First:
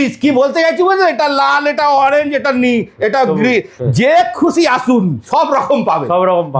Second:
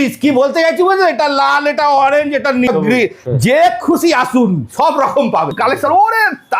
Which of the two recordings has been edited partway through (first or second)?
second